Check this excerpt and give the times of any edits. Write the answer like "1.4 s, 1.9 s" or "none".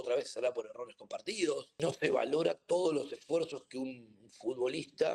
1.7 s